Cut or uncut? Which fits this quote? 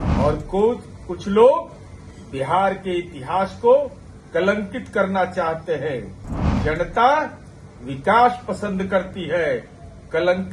uncut